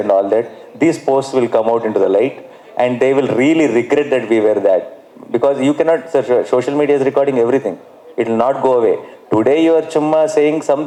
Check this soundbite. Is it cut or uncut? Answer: uncut